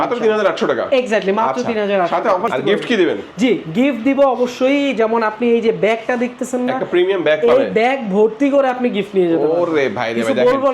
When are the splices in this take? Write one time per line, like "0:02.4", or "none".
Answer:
0:02.5

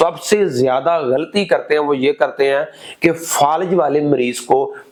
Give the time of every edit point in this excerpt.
none

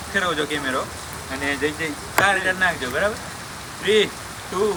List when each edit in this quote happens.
none

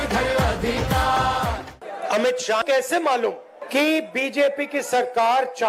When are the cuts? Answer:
0:01.7
0:02.6
0:03.6

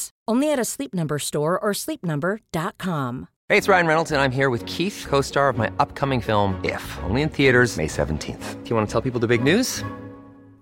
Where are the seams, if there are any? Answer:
0:03.3

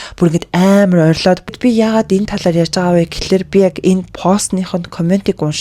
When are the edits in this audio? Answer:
0:01.6

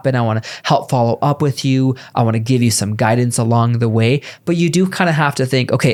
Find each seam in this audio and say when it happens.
none

